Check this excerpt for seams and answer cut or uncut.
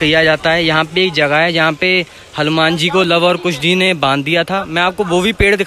uncut